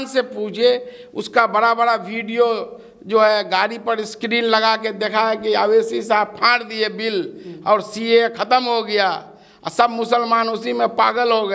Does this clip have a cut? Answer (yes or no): no